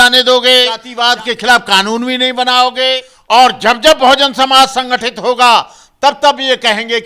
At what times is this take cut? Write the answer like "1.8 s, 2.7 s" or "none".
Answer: 0.9 s, 3.1 s